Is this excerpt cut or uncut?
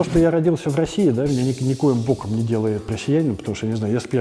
cut